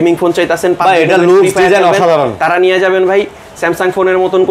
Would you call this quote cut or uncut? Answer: uncut